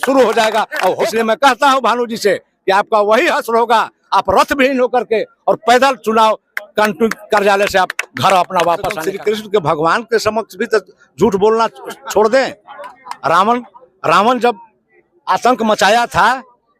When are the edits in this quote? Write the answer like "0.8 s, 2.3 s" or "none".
1.0 s, 9.1 s